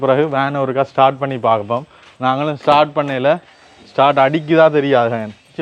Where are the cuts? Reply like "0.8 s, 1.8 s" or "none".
none